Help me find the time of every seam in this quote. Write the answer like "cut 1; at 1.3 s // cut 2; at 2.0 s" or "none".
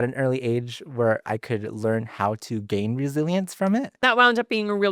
cut 1; at 1.3 s // cut 2; at 4.0 s

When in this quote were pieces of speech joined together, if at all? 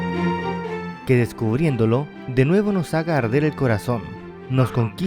cut 1; at 0.9 s

